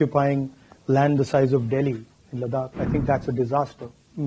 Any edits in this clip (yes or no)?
yes